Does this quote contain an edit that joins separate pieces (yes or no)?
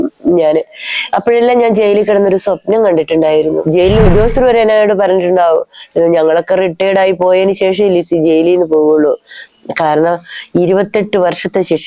yes